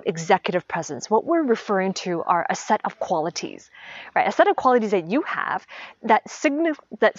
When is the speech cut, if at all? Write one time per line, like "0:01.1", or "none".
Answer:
none